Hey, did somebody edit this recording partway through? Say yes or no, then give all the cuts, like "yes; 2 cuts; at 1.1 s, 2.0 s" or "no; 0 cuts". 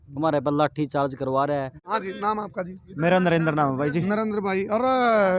yes; 1 cut; at 1.8 s